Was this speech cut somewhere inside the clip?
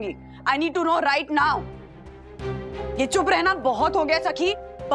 yes; 1 cut; at 2.8 s

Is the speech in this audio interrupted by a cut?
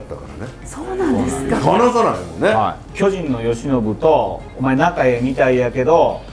yes; 1 cut; at 2.8 s

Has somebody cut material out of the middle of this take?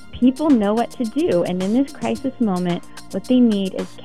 no; 0 cuts

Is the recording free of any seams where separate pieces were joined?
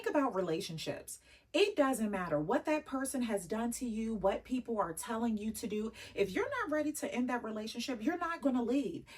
yes; 0 cuts

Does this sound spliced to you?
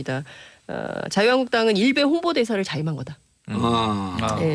no; 0 cuts

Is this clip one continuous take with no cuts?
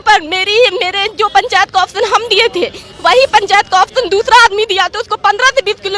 yes; 0 cuts

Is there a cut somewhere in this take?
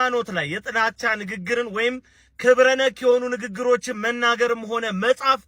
no; 0 cuts

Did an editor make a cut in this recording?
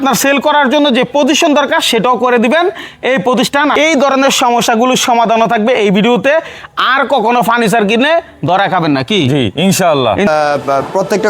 yes; 2 cuts; at 3.7 s, 10.2 s

